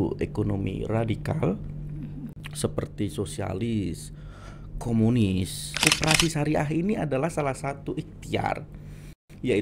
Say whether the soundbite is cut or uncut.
cut